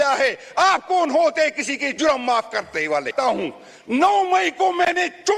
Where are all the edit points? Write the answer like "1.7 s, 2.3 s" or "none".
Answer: 3.1 s